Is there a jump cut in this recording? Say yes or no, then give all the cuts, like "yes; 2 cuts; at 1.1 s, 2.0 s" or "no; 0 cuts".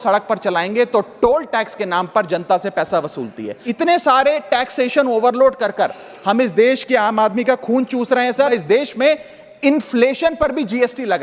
yes; 2 cuts; at 3.6 s, 8.5 s